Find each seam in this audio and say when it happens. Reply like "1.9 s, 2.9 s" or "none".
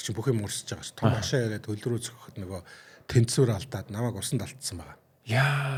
none